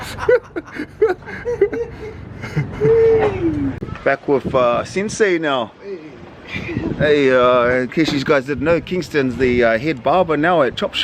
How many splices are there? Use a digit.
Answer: 1